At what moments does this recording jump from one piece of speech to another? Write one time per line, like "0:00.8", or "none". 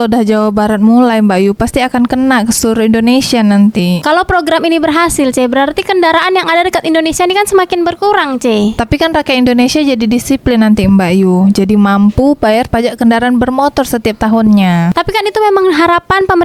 none